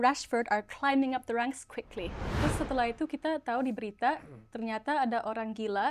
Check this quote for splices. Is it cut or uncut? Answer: cut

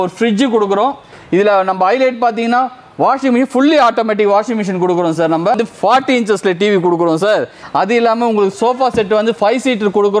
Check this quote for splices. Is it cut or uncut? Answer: cut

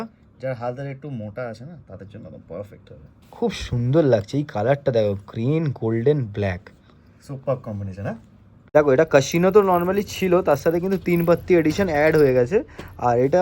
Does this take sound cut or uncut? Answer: cut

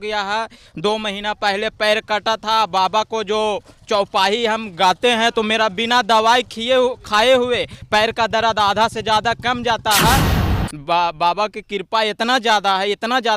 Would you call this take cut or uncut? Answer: cut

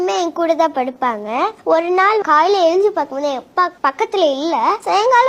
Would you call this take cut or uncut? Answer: cut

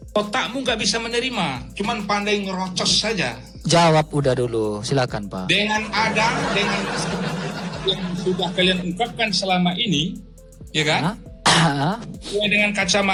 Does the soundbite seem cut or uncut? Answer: uncut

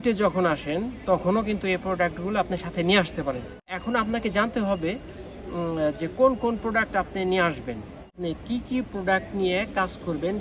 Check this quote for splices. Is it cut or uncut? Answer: cut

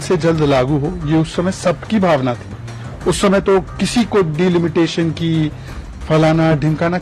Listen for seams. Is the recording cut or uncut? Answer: uncut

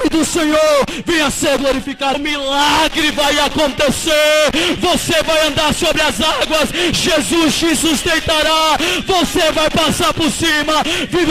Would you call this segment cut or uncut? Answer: cut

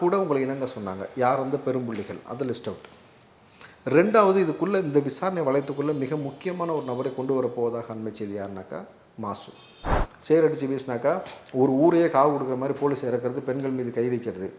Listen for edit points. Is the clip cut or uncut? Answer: cut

